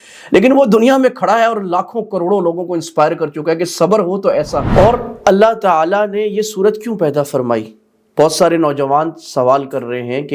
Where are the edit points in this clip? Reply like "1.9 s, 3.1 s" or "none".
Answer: 4.6 s